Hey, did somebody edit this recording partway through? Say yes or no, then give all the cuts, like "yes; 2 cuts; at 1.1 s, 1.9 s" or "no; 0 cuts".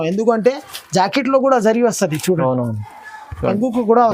no; 0 cuts